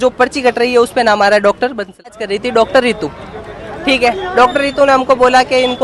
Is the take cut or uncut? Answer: cut